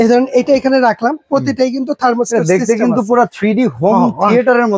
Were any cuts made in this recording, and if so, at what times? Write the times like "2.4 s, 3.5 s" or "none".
none